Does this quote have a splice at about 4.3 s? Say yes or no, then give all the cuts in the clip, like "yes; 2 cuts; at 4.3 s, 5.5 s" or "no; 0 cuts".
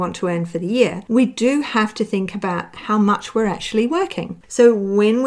yes; 1 cut; at 4.3 s